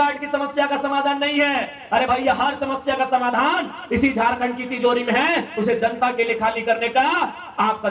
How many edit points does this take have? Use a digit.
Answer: 0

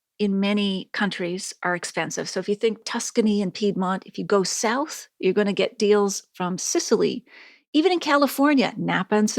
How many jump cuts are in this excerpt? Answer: 1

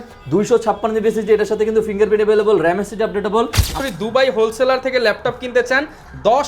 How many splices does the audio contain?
1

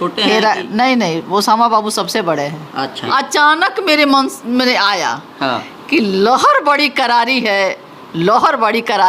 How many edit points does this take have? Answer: 1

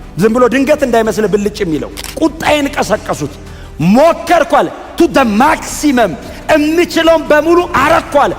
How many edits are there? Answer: 1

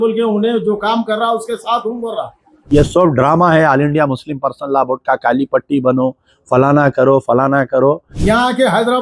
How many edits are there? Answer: 2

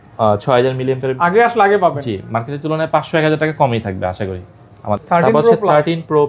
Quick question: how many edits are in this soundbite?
2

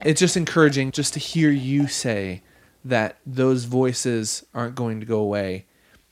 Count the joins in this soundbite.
1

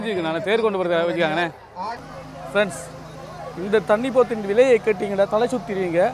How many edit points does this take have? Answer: 1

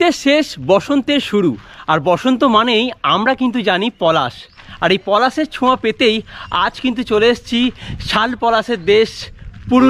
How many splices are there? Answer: 0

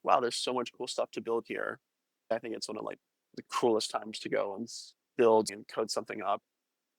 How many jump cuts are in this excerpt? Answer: 2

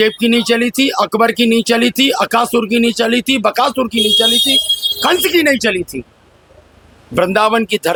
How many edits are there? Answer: 0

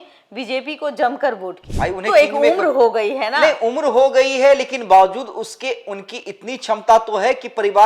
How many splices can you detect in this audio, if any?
1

